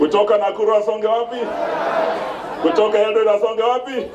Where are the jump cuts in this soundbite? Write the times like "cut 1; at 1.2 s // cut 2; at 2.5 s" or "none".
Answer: none